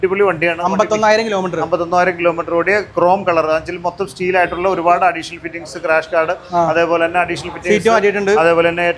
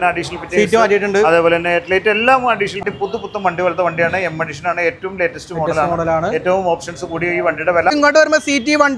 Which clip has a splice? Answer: second; 2 cuts; at 2.8 s, 7.9 s

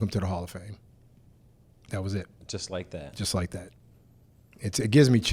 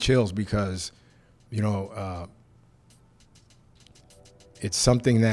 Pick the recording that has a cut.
first; 1 cut; at 3.8 s

